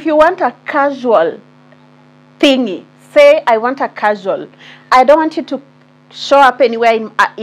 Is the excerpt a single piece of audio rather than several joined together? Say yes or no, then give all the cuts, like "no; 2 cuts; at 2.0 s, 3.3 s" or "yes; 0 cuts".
yes; 0 cuts